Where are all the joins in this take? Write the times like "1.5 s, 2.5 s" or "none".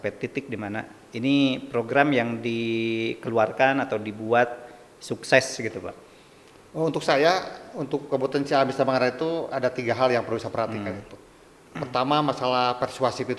none